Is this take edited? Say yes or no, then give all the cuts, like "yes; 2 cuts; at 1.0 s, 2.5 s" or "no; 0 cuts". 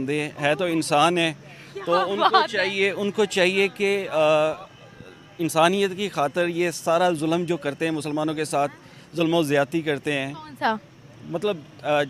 no; 0 cuts